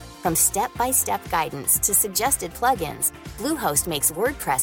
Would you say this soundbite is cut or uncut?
uncut